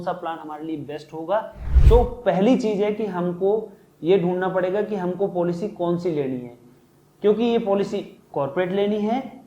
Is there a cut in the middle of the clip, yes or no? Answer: yes